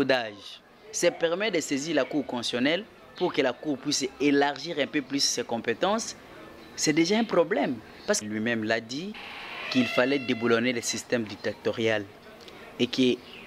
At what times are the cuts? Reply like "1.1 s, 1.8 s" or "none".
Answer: 8.2 s